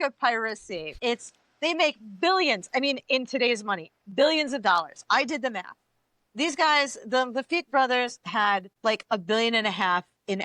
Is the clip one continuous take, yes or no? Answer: no